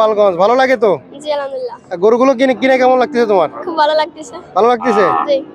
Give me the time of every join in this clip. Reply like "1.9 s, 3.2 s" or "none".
none

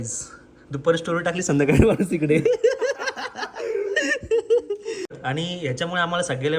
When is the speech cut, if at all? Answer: 5.6 s

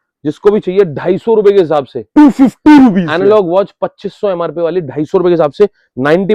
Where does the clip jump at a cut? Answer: none

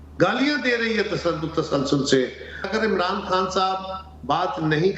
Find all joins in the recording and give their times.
2.7 s

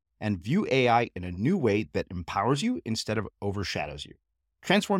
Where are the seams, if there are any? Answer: none

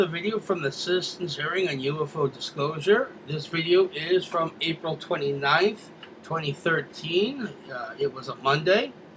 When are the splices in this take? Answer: none

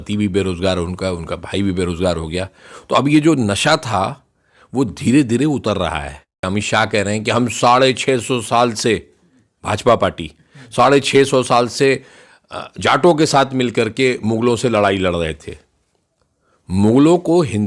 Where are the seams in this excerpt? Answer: 6.5 s

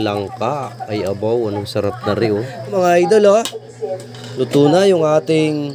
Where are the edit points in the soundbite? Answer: 2.7 s

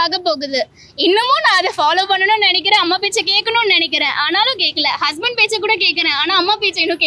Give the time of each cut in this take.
none

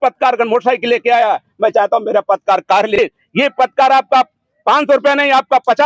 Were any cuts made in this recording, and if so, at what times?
3.0 s

